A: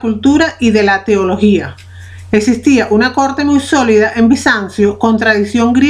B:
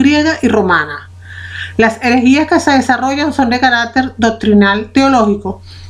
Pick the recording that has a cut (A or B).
A